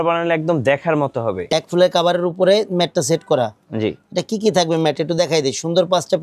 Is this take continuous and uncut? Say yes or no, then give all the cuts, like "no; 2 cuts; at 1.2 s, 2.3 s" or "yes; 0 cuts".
no; 1 cut; at 1.5 s